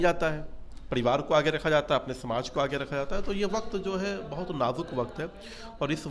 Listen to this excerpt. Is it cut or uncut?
uncut